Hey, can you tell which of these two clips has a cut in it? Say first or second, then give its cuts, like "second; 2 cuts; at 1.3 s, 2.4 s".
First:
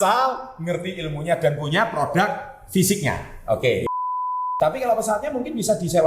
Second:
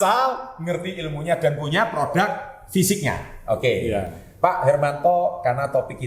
first; 1 cut; at 4.3 s